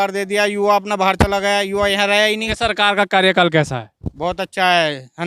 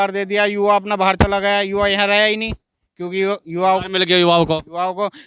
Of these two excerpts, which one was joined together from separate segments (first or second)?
first